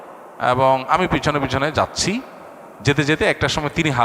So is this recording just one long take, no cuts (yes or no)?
yes